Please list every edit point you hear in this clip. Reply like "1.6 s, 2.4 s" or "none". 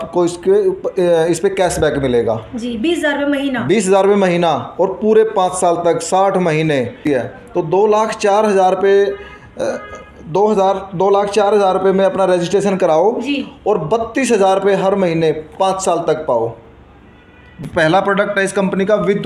7.0 s, 17.6 s

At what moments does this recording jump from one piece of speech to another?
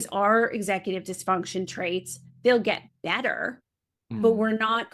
none

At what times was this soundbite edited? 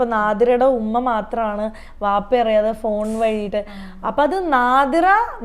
none

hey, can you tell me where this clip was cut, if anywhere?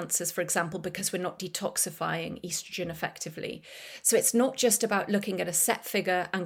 none

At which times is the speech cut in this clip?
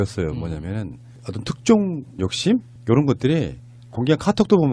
2.1 s

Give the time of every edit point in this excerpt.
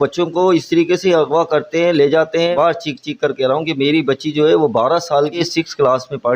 2.5 s, 5.3 s

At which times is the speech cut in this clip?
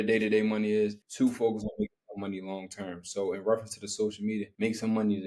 none

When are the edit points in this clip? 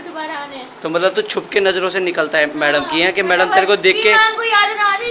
none

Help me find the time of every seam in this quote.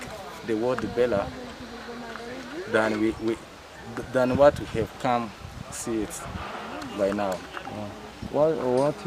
none

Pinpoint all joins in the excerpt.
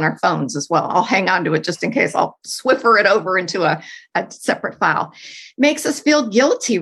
2.5 s

